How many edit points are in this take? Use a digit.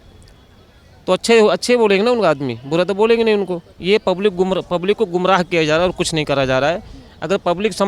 1